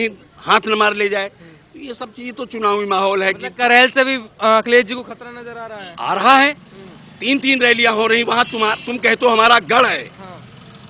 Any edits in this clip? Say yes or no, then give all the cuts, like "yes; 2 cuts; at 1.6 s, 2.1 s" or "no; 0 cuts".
no; 0 cuts